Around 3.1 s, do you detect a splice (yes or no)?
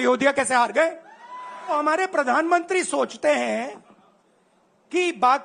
no